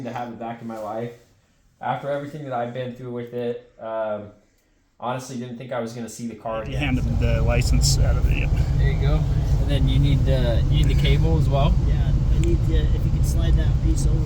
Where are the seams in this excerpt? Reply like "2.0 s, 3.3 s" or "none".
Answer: 6.8 s